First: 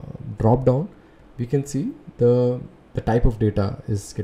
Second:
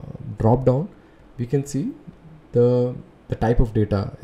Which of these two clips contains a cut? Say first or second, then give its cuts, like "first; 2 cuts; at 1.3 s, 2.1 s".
first; 1 cut; at 2.0 s